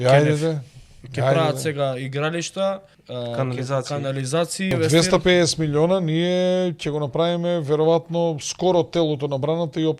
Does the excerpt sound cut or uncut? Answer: cut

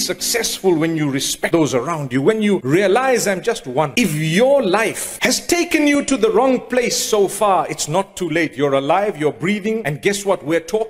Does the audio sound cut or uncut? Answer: cut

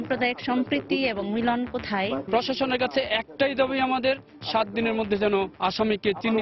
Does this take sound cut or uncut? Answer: cut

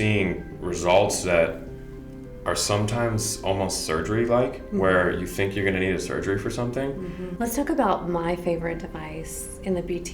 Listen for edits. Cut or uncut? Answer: cut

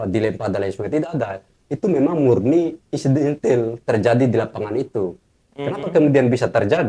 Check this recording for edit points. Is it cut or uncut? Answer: uncut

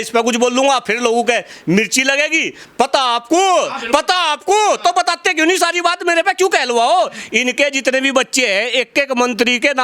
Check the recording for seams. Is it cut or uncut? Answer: cut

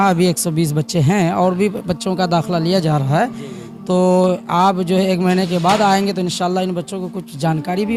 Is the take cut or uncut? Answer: uncut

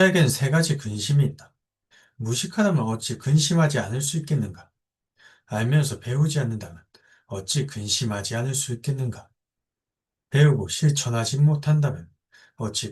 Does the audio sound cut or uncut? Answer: uncut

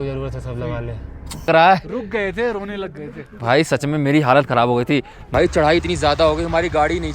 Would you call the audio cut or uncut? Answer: cut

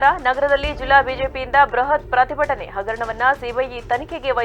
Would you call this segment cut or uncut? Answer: uncut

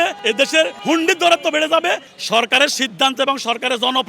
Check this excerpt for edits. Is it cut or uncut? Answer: cut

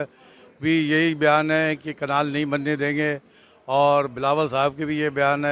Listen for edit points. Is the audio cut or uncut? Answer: uncut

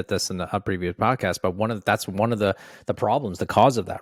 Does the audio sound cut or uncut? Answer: uncut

